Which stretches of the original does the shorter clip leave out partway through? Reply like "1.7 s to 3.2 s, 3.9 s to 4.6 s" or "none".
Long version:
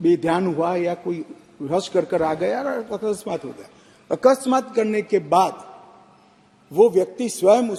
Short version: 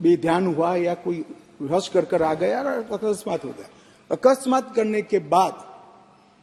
none